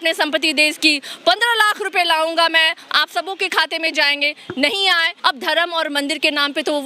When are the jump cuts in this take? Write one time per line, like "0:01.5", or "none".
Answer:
0:05.1